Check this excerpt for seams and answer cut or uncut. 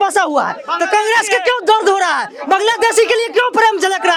uncut